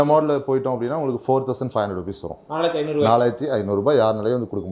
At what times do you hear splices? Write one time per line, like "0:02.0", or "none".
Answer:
none